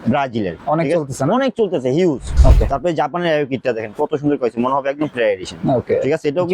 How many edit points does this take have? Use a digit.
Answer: 1